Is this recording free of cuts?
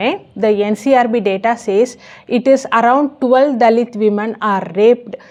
yes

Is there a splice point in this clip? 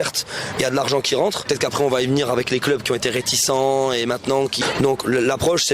yes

